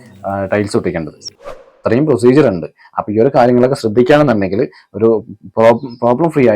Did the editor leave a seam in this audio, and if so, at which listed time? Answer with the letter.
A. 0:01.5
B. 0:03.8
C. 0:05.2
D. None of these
A